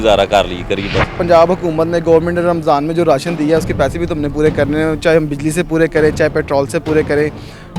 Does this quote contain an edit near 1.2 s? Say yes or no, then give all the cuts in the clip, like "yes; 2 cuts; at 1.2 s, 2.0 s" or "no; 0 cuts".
yes; 1 cut; at 1.2 s